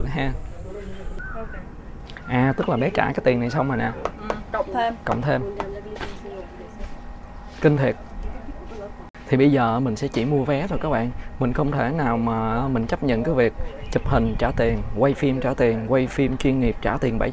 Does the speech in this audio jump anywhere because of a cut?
yes; 2 cuts; at 1.1 s, 9.0 s

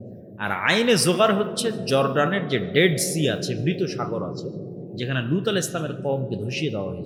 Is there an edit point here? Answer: no; 0 cuts

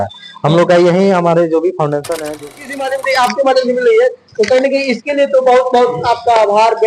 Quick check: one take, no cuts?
no; 1 cut; at 2.4 s

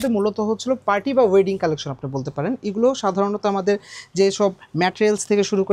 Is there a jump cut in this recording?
no; 0 cuts

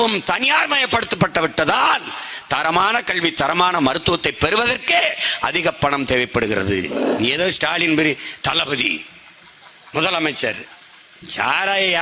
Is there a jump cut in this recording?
yes; 1 cut; at 7.0 s

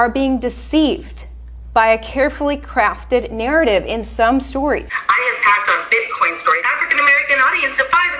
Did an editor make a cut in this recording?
yes; 2 cuts; at 4.9 s, 6.6 s

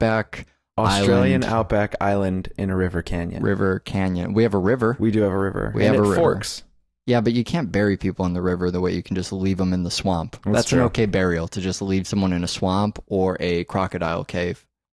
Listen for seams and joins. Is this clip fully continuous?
no; 1 cut; at 3.6 s

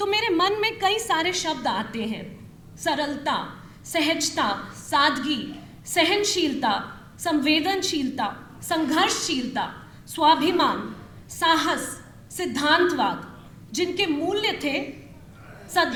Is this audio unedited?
yes; 0 cuts

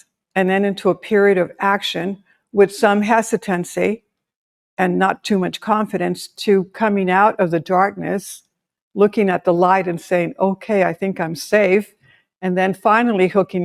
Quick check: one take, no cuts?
yes; 0 cuts

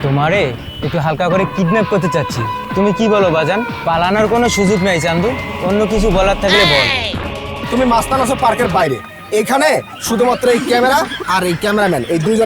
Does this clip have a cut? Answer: yes; 2 cuts; at 3.8 s, 7.1 s

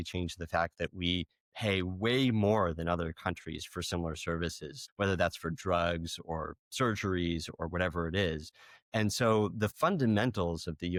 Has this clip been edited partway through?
no; 0 cuts

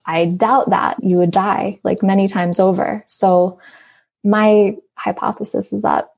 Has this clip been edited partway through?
yes; 1 cut; at 0.9 s

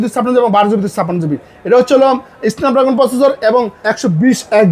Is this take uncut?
no; 1 cut; at 3.8 s

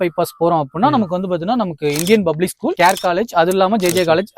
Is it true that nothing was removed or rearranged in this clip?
yes; 0 cuts

